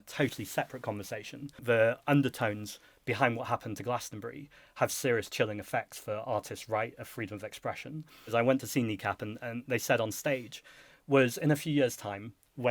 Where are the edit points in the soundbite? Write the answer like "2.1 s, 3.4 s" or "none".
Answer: 1.6 s, 8.3 s